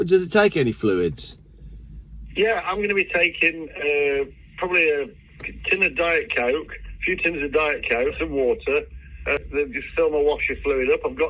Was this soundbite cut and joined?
yes; 2 cuts; at 8.2 s, 9.4 s

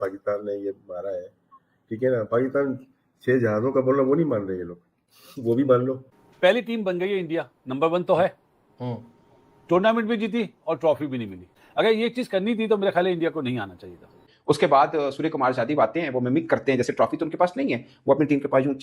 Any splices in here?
yes; 3 cuts; at 6.1 s, 11.5 s, 14.2 s

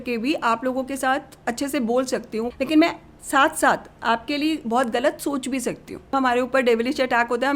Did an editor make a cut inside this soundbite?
yes; 3 cuts; at 1.3 s, 2.5 s, 6.1 s

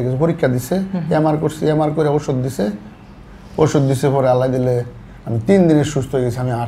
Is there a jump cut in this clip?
no; 0 cuts

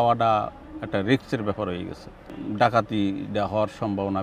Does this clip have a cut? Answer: yes; 1 cut; at 2.4 s

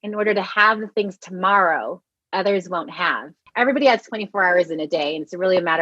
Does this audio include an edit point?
yes; 1 cut; at 3.4 s

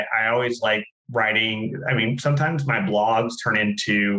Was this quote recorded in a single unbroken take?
no; 1 cut; at 1.0 s

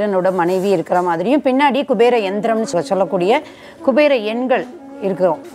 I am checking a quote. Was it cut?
no; 0 cuts

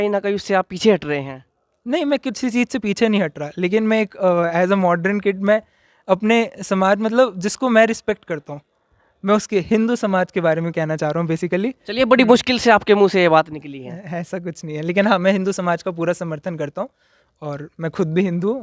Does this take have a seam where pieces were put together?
no; 0 cuts

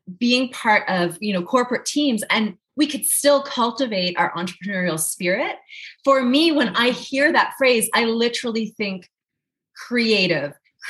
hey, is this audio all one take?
yes; 0 cuts

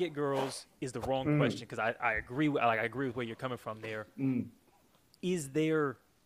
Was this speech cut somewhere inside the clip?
no; 0 cuts

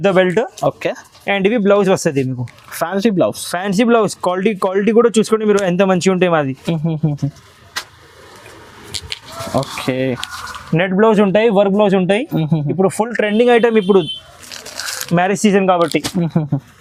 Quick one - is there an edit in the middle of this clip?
no; 0 cuts

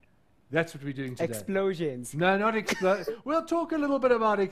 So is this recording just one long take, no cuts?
no; 1 cut; at 3.2 s

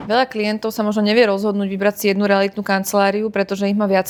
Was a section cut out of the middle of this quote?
no; 0 cuts

